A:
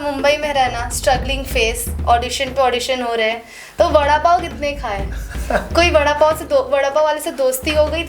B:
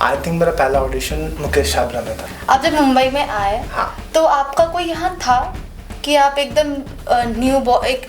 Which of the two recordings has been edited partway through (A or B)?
B